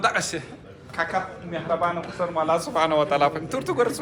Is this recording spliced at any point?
no; 0 cuts

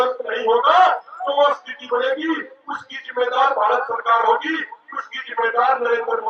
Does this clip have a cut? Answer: no; 0 cuts

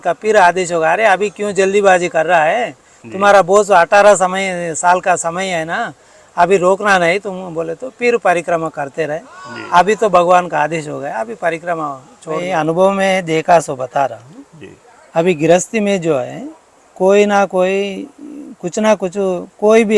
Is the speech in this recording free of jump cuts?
no; 1 cut; at 12.5 s

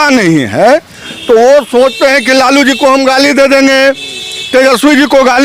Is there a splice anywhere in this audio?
no; 0 cuts

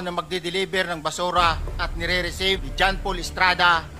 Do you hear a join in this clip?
yes; 1 cut; at 2.7 s

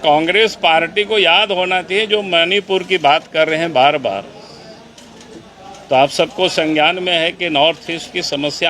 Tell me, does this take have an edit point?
no; 0 cuts

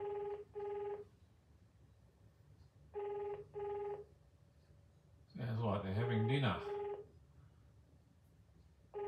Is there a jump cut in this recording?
yes; 1 cut; at 0.9 s

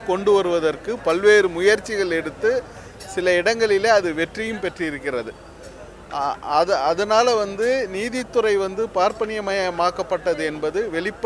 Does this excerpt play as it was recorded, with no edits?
yes; 0 cuts

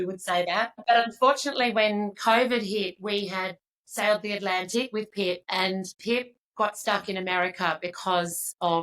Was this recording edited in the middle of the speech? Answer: yes; 2 cuts; at 0.8 s, 5.9 s

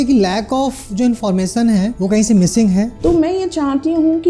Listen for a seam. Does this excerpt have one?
yes; 2 cuts; at 1.9 s, 2.9 s

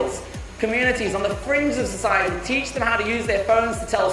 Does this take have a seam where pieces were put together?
no; 0 cuts

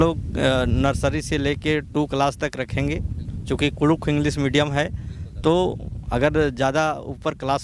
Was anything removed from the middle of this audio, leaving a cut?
no; 0 cuts

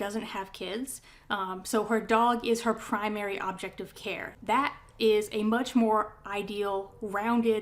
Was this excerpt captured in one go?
no; 1 cut; at 4.3 s

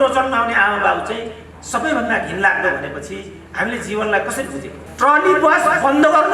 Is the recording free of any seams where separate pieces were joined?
no; 1 cut; at 4.8 s

